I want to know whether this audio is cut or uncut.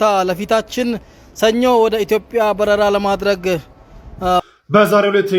cut